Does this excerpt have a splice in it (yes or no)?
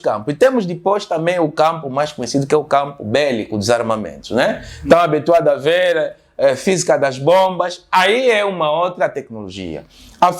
no